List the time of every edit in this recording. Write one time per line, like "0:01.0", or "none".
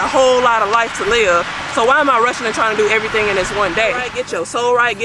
0:04.1